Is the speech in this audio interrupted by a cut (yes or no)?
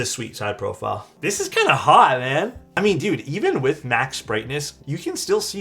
yes